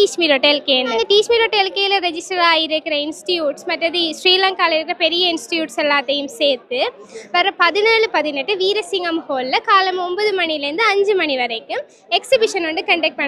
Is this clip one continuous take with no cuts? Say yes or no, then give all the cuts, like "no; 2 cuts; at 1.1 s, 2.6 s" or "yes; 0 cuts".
no; 1 cut; at 0.9 s